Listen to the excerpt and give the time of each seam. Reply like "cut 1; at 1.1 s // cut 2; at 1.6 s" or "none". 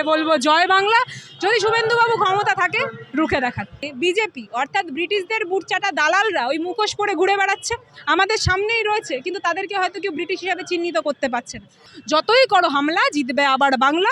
cut 1; at 3.9 s // cut 2; at 11.9 s